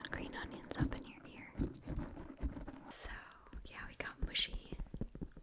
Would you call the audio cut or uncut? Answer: cut